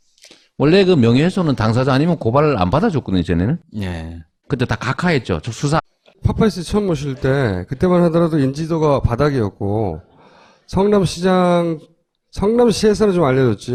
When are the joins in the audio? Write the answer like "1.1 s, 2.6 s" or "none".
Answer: none